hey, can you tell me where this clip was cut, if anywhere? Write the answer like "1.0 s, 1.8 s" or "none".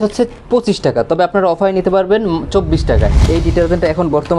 3.2 s